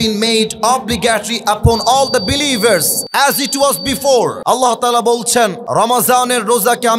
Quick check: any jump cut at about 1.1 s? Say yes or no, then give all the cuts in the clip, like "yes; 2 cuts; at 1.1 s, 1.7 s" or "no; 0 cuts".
no; 3 cuts; at 3.0 s, 4.4 s, 5.6 s